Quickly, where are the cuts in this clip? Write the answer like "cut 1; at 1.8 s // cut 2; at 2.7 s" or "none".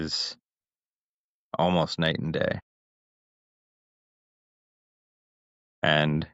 none

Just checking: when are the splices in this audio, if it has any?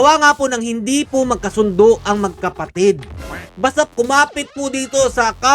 cut 1; at 3.5 s

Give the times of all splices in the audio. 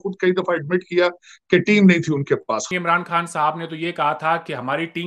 cut 1; at 2.7 s

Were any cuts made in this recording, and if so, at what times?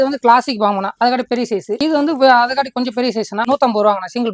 cut 1; at 3.4 s

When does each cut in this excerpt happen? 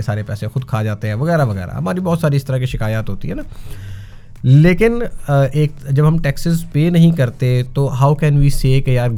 none

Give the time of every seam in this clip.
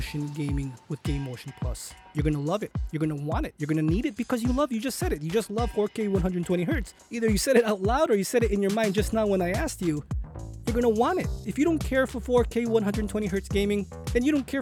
none

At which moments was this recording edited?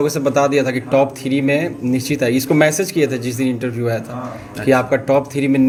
none

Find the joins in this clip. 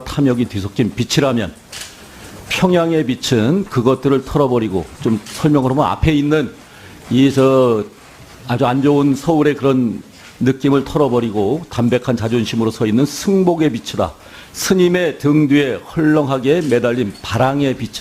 cut 1; at 13.4 s

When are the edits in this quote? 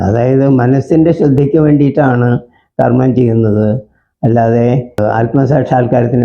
cut 1; at 5.0 s

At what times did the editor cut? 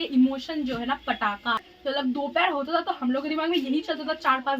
cut 1; at 1.7 s

